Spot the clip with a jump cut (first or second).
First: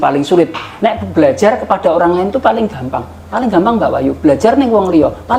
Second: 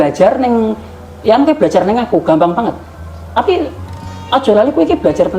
second